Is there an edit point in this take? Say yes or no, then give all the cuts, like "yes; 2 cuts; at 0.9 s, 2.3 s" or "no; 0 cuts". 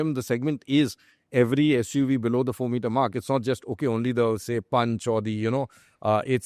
no; 0 cuts